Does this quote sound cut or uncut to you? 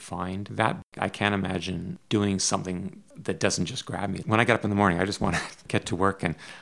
cut